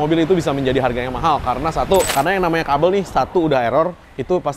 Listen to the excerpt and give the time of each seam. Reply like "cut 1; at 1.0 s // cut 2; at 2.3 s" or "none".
cut 1; at 2.1 s